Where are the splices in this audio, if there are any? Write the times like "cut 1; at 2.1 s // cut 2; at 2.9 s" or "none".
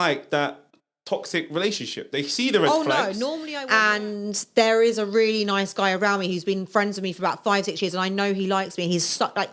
cut 1; at 3.5 s